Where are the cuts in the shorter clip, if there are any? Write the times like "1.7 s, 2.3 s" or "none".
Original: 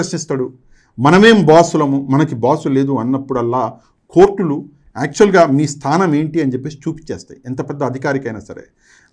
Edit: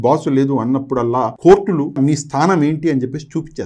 1.3 s, 2.0 s